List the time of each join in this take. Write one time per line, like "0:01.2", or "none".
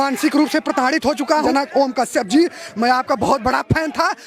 0:01.5